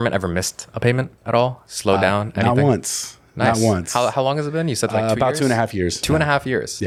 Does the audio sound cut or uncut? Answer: uncut